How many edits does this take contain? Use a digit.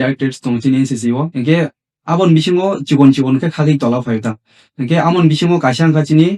1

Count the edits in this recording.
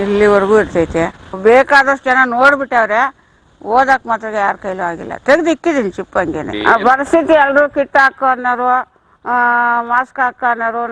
2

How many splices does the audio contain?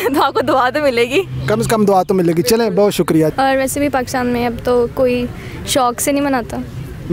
1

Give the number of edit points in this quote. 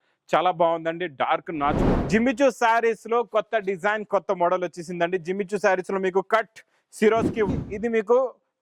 2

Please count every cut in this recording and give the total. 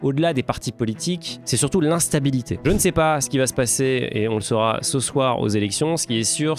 2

